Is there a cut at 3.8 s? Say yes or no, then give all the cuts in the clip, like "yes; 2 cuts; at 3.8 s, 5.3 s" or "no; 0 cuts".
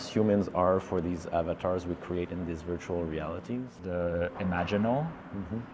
yes; 1 cut; at 3.8 s